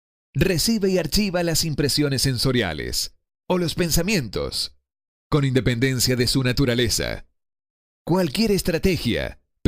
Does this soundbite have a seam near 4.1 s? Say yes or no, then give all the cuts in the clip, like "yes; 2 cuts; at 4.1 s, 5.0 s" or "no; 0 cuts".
no; 1 cut; at 6.0 s